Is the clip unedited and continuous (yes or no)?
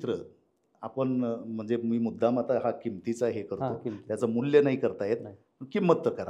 yes